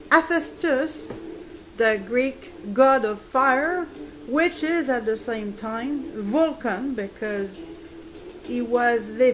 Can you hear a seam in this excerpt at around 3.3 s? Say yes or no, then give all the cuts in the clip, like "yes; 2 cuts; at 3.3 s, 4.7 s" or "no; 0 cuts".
no; 1 cut; at 1.5 s